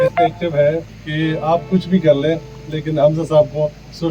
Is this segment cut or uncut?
cut